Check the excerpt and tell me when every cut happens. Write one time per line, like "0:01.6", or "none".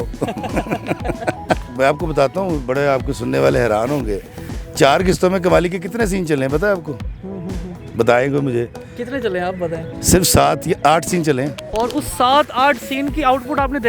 none